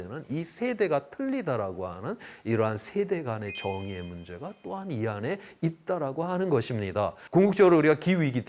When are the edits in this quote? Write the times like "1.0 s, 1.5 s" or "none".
7.2 s